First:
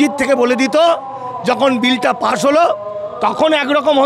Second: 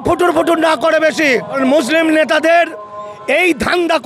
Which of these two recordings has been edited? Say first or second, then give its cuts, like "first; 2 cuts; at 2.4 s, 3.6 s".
second; 1 cut; at 1.5 s